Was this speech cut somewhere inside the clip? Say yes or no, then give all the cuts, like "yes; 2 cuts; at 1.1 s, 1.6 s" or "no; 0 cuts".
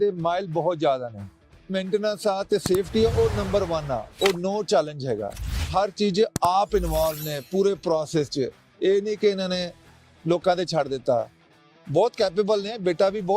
yes; 2 cuts; at 1.7 s, 5.7 s